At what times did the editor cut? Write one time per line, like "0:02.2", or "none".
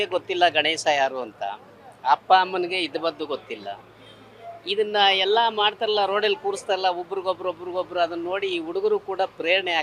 none

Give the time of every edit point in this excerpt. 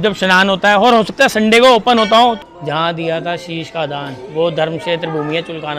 0:02.4

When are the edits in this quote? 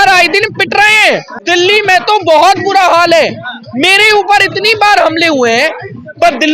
0:01.3

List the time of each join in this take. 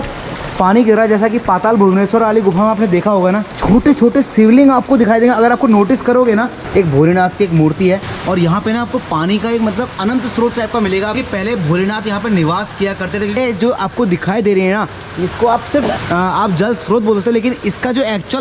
0:03.5
0:06.6
0:08.1
0:11.1
0:13.4
0:15.9

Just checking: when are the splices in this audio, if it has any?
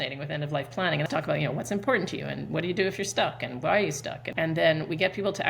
0:01.1
0:04.2

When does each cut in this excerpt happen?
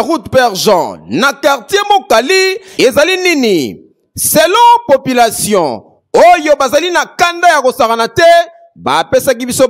0:02.6

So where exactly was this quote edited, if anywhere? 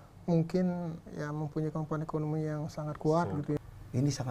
0:01.0
0:03.6

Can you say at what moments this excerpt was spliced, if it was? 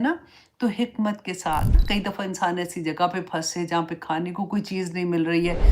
0:01.8

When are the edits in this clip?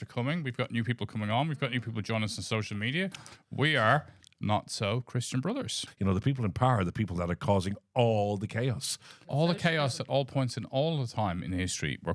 0:05.8
0:09.2

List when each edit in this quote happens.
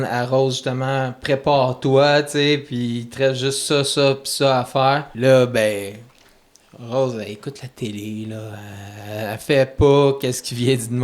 0:05.1

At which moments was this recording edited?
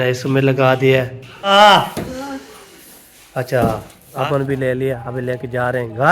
0:01.5
0:04.1

